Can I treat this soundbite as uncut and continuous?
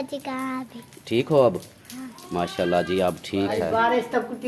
no; 1 cut; at 3.6 s

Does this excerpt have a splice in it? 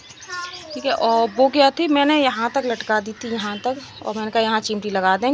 no; 0 cuts

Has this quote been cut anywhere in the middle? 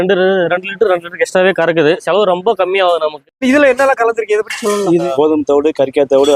yes; 3 cuts; at 2.0 s, 3.3 s, 5.1 s

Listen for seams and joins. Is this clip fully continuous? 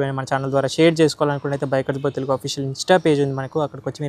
yes; 0 cuts

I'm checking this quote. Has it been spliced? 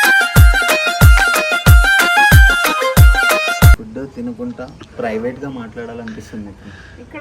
yes; 1 cut; at 3.8 s

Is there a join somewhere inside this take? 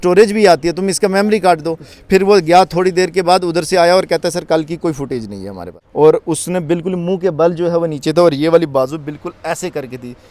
yes; 1 cut; at 5.8 s

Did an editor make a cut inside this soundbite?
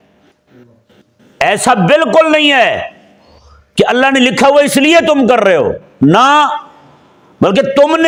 no; 0 cuts

